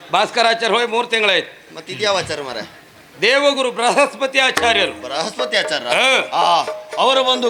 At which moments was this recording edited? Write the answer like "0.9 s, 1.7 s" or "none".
none